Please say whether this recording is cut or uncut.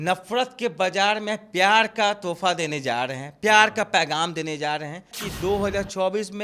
cut